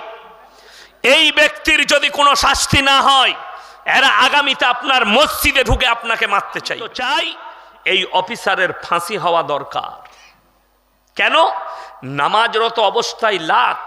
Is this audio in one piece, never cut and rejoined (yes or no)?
no